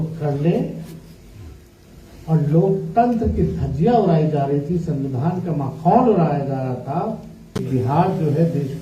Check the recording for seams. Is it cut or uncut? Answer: cut